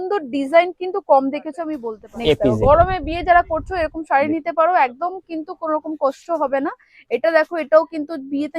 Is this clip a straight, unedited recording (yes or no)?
no